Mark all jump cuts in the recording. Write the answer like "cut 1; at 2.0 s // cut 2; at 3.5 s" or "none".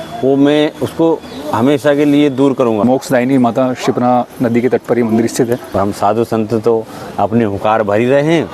cut 1; at 2.8 s // cut 2; at 5.7 s